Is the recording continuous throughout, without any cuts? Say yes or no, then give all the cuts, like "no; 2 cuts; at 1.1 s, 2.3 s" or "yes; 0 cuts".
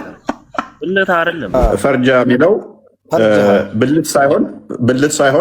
no; 1 cut; at 1.5 s